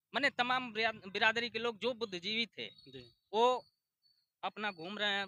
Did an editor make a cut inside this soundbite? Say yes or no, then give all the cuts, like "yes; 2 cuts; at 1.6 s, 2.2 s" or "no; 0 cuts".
no; 0 cuts